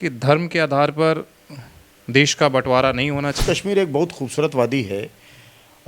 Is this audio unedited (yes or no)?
no